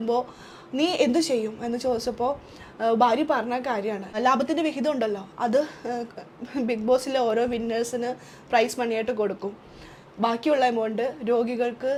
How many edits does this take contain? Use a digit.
0